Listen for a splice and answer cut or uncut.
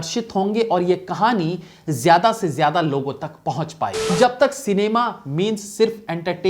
cut